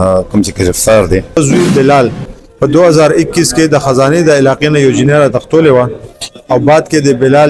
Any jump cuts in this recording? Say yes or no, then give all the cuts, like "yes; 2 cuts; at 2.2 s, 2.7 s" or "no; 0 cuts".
yes; 1 cut; at 1.4 s